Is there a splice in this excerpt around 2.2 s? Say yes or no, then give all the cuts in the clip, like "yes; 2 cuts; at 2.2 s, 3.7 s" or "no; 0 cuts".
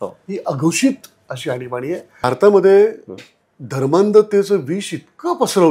yes; 1 cut; at 2.2 s